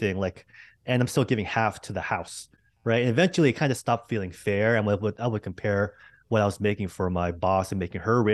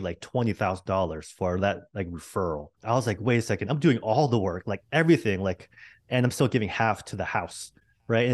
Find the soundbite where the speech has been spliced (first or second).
second